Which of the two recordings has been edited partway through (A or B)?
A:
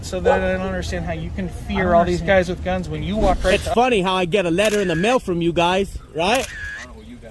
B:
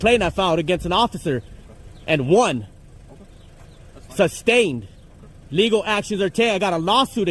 A